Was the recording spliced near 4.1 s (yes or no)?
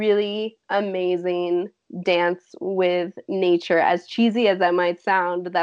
no